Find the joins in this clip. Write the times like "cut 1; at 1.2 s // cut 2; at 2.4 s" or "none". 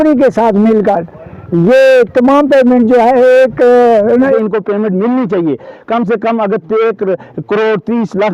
cut 1; at 4.2 s